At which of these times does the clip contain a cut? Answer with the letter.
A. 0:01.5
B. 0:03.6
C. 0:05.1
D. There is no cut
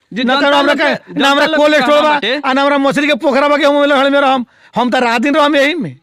D